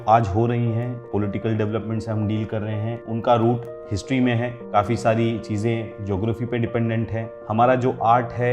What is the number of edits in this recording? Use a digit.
4